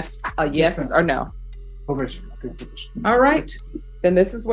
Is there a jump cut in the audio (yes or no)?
no